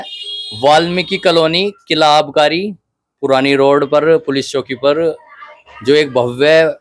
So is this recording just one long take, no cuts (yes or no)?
yes